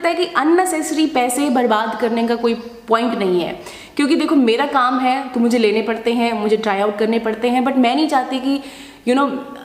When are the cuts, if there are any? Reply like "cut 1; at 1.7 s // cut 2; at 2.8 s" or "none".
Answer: none